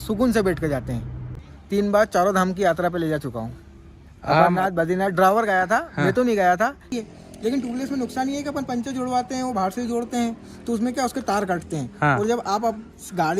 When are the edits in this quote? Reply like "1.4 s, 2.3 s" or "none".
1.4 s, 6.9 s